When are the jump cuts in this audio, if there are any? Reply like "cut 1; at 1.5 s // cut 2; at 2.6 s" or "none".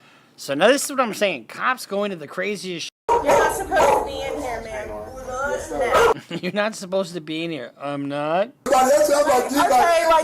cut 1; at 3.1 s // cut 2; at 8.6 s